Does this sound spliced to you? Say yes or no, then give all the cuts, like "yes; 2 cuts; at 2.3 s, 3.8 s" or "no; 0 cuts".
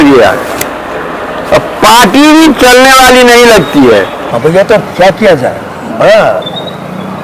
yes; 1 cut; at 4.2 s